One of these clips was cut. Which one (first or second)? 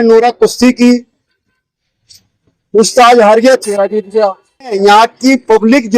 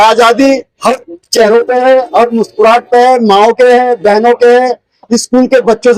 first